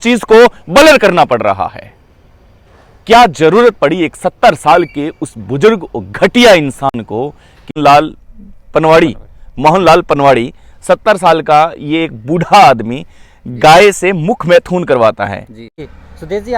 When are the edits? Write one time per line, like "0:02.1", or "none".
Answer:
0:07.7